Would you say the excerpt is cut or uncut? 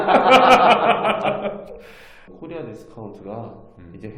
cut